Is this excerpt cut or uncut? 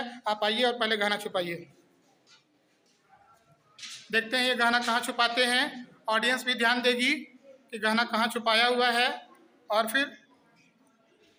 uncut